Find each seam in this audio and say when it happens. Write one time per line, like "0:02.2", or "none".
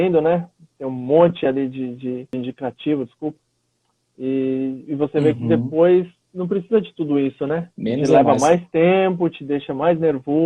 0:02.3
0:07.7